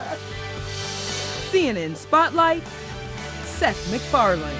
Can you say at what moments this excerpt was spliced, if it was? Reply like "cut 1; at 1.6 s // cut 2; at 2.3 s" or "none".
cut 1; at 3.7 s